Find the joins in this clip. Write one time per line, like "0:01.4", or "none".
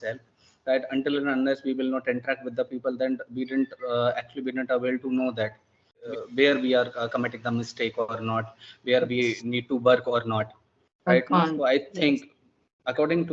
0:06.0